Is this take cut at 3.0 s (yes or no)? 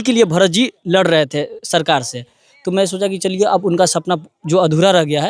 no